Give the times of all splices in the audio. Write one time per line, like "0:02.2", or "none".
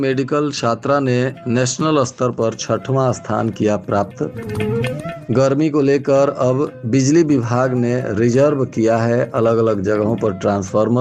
none